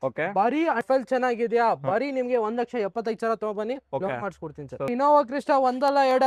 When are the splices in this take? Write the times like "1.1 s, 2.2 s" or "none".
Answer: 0.8 s, 4.9 s